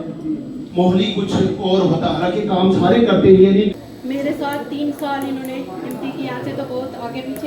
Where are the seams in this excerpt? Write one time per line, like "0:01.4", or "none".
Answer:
0:03.7